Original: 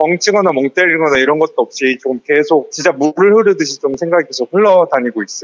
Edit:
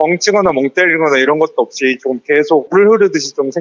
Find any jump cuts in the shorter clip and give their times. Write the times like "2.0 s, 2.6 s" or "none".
2.7 s